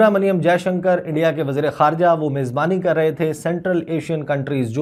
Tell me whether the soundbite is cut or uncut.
uncut